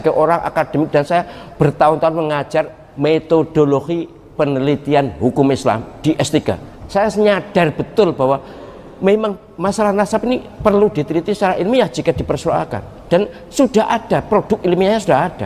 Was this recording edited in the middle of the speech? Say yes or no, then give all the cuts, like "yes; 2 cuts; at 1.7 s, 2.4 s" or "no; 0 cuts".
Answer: yes; 4 cuts; at 2.8 s, 4.2 s, 6.7 s, 9.5 s